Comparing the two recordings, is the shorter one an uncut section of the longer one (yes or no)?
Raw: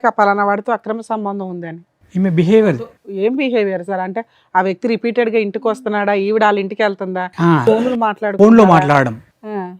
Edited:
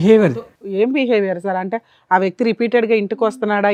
yes